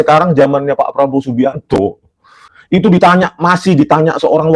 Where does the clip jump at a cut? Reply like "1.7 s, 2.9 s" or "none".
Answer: 2.4 s